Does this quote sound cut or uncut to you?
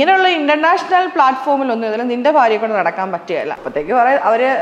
cut